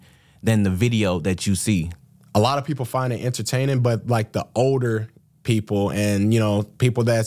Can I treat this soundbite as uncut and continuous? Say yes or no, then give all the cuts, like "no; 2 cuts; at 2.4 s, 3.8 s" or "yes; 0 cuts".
no; 1 cut; at 2.0 s